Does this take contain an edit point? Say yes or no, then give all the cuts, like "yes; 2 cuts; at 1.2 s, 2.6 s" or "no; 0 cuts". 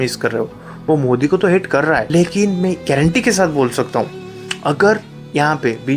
yes; 1 cut; at 2.0 s